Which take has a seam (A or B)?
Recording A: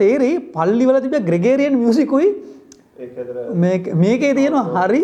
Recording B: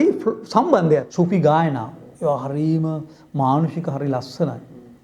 B